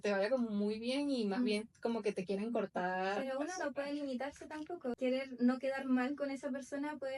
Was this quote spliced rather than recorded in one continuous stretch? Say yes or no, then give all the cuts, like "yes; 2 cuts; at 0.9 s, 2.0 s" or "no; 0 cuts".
yes; 1 cut; at 5.0 s